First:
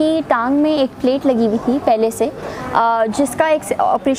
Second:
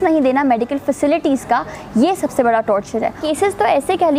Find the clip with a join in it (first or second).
second